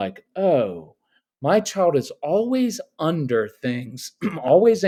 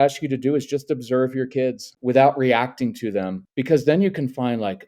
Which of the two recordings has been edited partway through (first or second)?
second